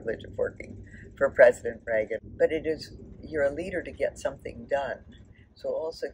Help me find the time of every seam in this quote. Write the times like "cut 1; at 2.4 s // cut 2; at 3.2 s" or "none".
cut 1; at 2.2 s